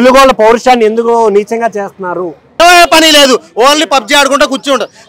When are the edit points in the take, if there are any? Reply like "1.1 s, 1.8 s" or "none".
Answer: 2.6 s